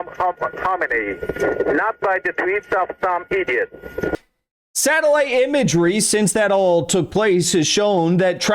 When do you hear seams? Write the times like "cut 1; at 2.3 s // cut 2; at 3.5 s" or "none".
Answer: cut 1; at 4.1 s